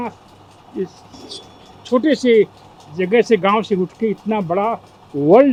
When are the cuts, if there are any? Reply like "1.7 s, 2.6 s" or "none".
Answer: none